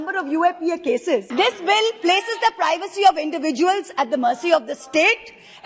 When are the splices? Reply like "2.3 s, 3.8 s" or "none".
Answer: 1.3 s